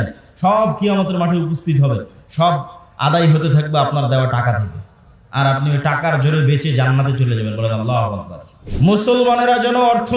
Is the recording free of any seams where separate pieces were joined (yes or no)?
no